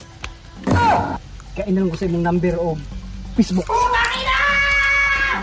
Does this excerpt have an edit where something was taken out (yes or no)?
no